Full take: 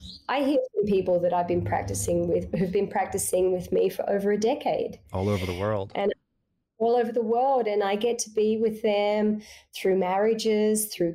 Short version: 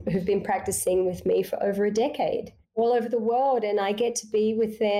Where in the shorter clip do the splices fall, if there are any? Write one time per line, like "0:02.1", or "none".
0:02.6